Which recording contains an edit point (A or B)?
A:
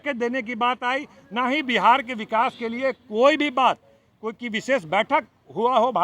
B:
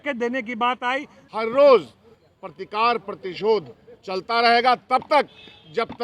B